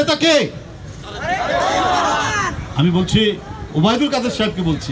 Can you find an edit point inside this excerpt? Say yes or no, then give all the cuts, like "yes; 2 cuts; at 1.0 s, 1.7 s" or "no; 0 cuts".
no; 0 cuts